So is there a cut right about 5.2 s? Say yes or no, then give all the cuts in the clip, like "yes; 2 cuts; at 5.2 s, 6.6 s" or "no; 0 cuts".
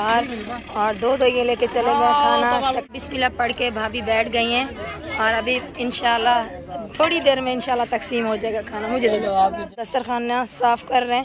no; 2 cuts; at 2.9 s, 9.8 s